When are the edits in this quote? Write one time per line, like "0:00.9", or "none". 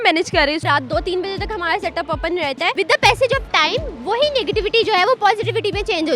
0:02.7

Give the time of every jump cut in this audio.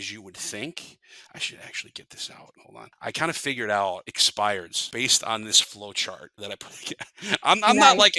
0:02.6
0:04.2
0:04.8
0:06.3

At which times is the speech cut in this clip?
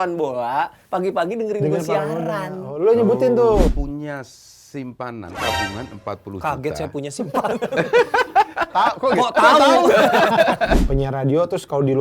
0:03.7
0:10.8

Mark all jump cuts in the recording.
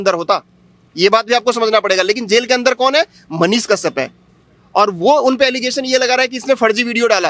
none

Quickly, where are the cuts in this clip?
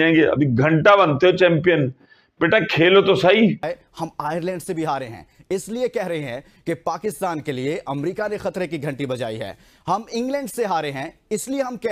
0:03.6

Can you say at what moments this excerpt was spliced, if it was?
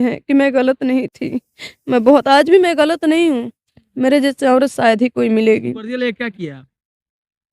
0:05.9

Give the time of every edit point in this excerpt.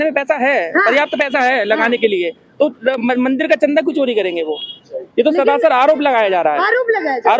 none

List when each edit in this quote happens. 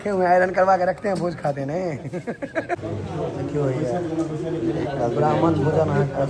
0:02.8

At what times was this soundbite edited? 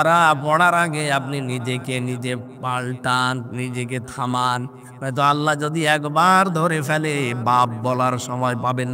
none

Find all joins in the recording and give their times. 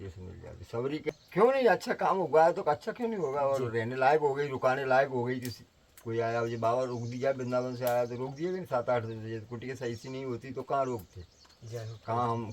0:01.1

